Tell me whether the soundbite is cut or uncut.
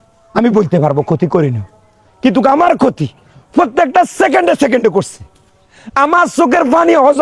uncut